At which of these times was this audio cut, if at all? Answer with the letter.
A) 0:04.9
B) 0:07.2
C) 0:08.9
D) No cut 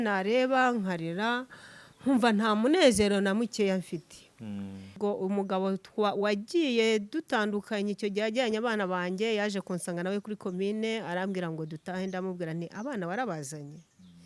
A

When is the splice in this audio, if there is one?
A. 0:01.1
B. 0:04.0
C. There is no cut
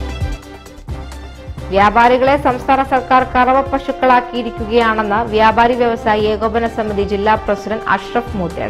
A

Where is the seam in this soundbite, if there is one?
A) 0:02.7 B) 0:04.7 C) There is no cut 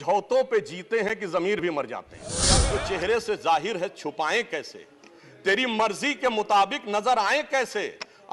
A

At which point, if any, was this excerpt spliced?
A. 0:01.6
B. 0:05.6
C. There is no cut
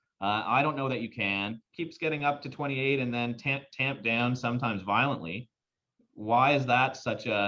A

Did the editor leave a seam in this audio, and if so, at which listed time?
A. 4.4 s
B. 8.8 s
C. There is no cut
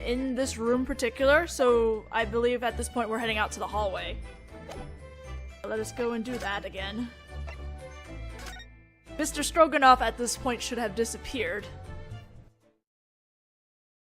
B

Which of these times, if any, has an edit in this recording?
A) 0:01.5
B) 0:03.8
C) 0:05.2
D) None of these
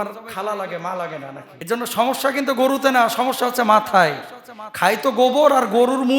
A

